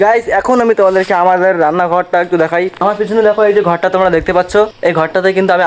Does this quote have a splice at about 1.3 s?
no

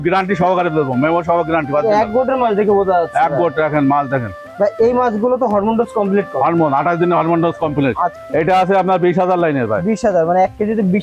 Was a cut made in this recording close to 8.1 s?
yes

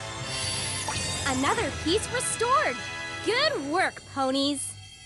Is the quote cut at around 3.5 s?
no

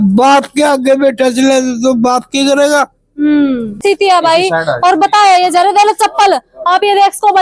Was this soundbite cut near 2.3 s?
no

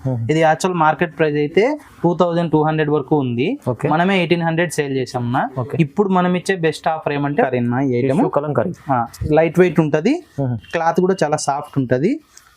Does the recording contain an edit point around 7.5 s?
yes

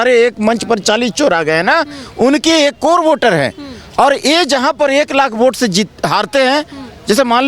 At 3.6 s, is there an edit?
no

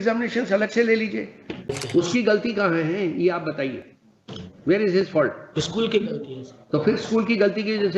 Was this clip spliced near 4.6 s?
no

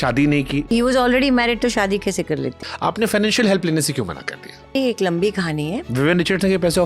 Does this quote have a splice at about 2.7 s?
yes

